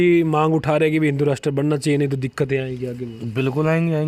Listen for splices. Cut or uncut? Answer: uncut